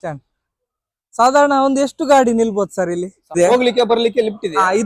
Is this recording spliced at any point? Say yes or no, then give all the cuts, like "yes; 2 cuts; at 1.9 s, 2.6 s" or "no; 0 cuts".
yes; 1 cut; at 3.4 s